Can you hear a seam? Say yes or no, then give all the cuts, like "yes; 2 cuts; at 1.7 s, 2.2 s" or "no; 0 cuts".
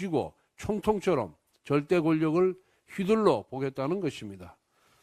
no; 0 cuts